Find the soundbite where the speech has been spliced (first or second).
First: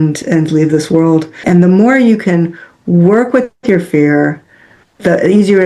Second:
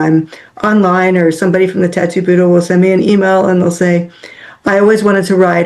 first